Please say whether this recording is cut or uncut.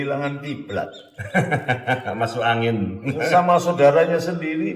uncut